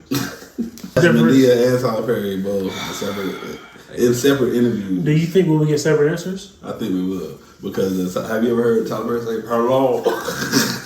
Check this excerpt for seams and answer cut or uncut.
cut